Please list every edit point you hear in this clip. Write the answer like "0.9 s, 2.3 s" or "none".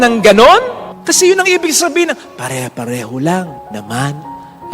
none